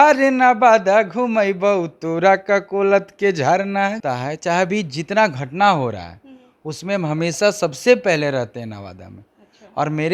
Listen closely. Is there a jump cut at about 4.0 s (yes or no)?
yes